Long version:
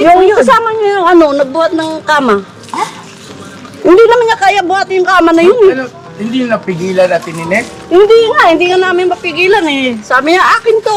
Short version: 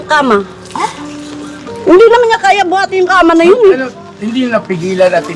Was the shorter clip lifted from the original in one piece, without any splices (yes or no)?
yes